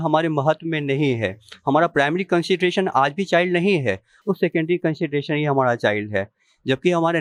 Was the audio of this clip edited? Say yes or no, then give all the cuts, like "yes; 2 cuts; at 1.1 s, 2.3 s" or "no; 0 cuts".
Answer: no; 0 cuts